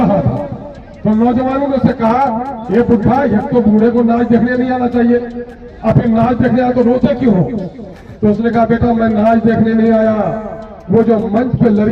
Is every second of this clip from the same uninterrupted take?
yes; 0 cuts

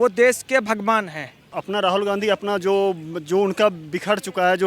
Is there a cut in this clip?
yes; 1 cut; at 1.5 s

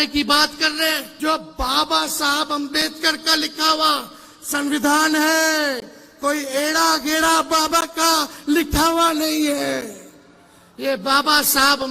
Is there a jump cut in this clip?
yes; 1 cut; at 1.1 s

